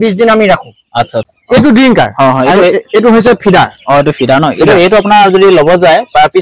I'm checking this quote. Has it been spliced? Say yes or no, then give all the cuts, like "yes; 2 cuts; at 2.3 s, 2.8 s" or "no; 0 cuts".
yes; 1 cut; at 1.3 s